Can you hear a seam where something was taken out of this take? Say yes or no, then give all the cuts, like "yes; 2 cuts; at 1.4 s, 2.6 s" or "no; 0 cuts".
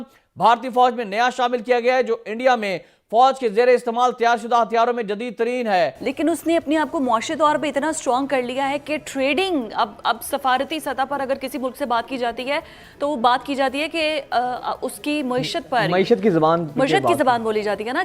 yes; 1 cut; at 6.0 s